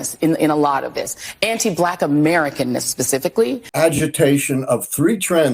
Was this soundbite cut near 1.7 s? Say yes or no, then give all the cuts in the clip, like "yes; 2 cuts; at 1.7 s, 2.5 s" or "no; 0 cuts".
no; 1 cut; at 3.6 s